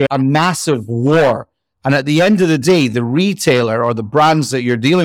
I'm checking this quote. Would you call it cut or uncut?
uncut